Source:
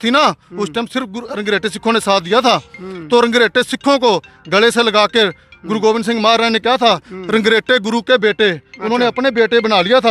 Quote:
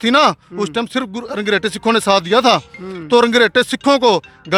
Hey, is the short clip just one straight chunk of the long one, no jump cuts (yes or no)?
yes